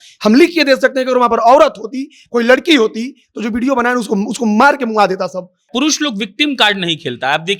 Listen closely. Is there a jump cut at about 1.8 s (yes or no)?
no